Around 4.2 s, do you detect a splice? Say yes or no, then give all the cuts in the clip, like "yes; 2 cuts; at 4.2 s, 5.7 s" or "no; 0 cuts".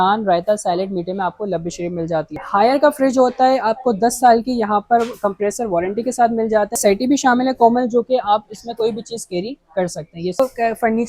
no; 3 cuts; at 2.4 s, 6.8 s, 10.4 s